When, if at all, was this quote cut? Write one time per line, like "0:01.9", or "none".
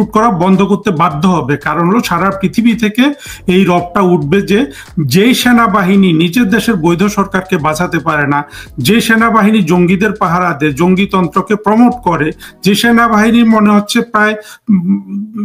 none